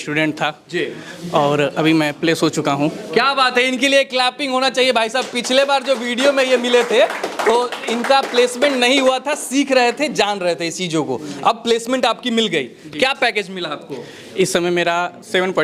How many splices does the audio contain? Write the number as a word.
zero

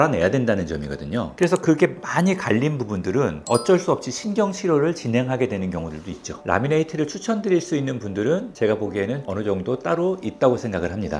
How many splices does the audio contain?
two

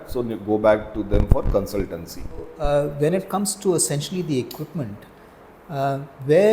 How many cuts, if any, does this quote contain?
one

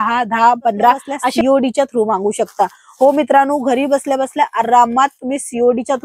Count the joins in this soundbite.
one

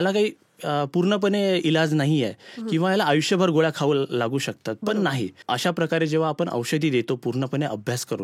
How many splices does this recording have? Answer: one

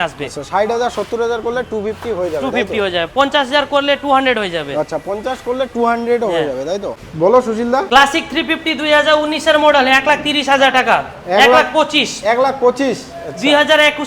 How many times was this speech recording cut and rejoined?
two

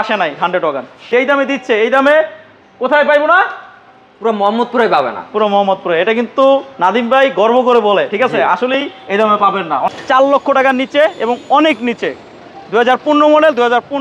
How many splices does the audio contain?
two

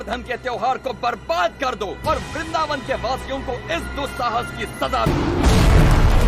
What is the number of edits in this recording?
one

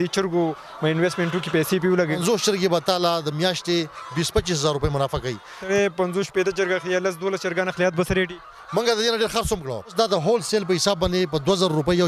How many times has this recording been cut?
three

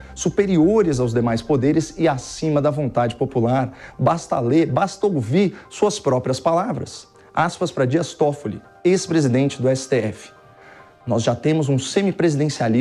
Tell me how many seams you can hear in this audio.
zero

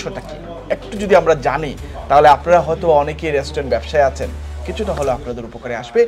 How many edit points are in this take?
zero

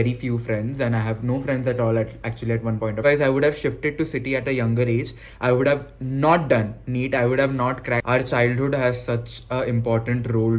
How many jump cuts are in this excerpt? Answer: two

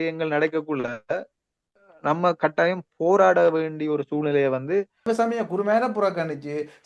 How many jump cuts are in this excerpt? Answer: one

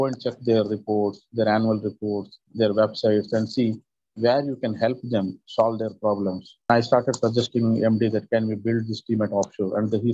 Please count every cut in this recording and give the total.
one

